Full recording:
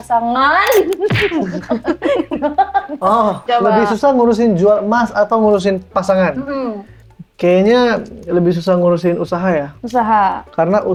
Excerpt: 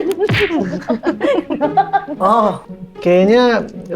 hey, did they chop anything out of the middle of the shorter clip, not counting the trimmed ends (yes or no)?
yes